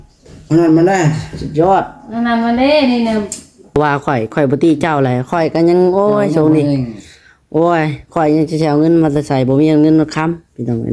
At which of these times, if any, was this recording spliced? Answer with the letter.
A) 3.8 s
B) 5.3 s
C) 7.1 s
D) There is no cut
A